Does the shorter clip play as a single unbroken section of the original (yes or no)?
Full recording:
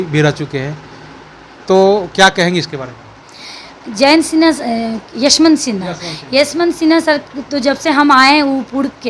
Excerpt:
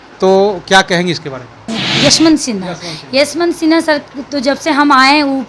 no